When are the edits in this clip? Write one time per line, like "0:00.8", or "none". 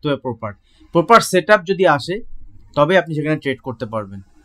none